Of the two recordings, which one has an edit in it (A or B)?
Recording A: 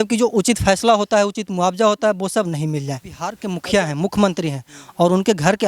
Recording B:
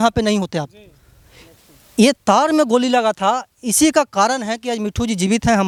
A